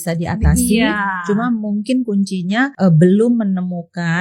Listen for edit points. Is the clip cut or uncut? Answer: cut